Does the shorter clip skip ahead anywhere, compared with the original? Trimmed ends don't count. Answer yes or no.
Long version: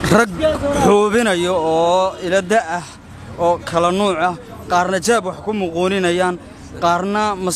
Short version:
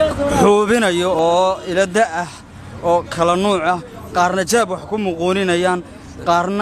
yes